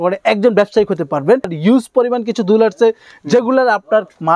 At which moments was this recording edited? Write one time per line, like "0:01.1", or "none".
0:01.5